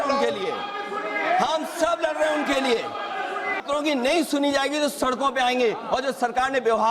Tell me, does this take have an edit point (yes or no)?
yes